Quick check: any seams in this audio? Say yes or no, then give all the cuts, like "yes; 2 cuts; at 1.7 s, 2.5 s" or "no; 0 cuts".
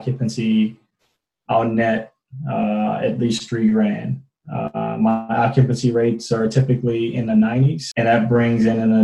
yes; 1 cut; at 7.8 s